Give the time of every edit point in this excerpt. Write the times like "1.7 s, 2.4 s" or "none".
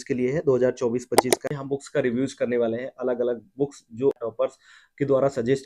1.5 s, 4.2 s